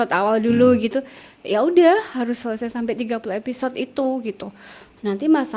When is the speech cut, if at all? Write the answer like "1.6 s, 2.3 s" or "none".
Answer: none